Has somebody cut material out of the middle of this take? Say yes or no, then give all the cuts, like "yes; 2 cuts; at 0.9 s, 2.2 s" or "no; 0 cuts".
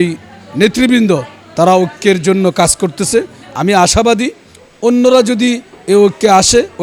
no; 0 cuts